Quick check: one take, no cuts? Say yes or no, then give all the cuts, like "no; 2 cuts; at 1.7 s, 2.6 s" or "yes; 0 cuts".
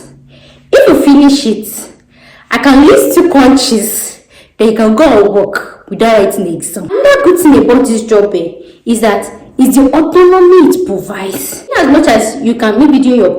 no; 2 cuts; at 7.0 s, 11.7 s